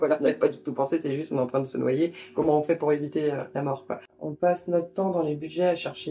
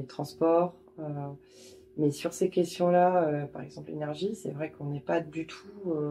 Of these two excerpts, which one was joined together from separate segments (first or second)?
first